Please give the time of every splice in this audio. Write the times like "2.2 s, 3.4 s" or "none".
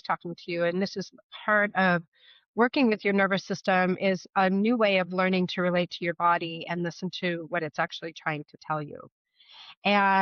none